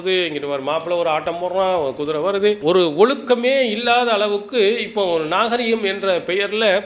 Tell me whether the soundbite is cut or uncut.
cut